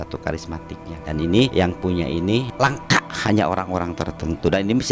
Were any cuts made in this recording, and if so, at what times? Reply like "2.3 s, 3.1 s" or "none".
0.9 s, 1.5 s, 2.5 s